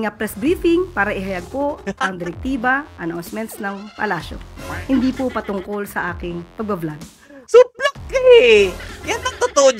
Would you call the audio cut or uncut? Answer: uncut